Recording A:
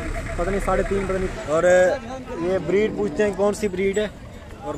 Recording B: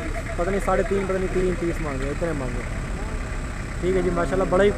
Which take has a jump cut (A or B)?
A